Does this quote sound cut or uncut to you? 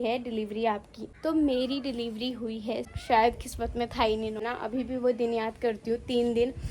cut